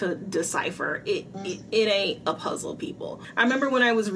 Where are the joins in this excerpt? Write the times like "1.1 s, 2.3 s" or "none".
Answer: 3.2 s

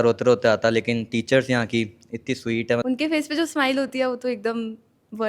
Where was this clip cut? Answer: 2.8 s

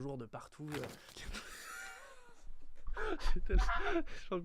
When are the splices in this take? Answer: 1.2 s

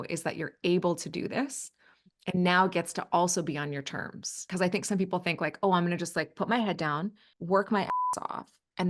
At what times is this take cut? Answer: 4.4 s, 7.3 s

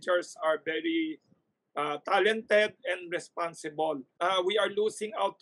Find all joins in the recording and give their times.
4.1 s

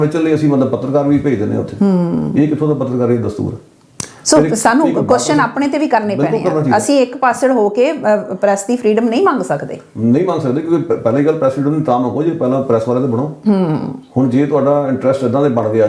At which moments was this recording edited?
none

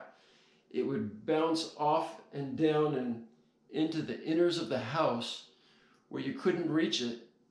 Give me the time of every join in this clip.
none

